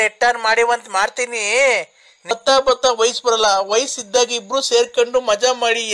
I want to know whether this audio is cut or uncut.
cut